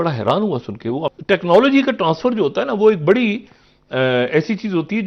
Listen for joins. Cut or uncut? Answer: cut